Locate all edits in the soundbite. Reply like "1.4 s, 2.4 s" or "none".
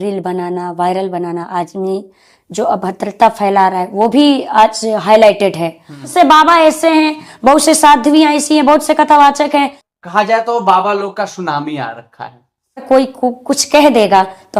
6.1 s, 9.8 s, 12.8 s